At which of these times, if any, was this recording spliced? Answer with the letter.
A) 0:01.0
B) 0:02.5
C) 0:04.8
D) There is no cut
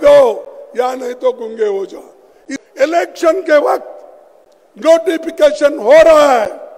B